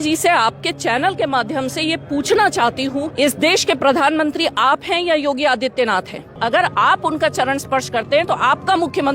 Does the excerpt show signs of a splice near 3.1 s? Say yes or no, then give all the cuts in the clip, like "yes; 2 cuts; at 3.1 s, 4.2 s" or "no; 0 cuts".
yes; 2 cuts; at 3.1 s, 6.4 s